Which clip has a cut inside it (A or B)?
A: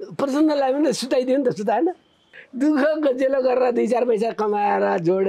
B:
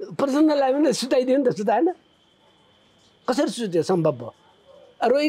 A